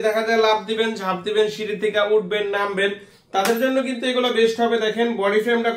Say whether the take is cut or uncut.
uncut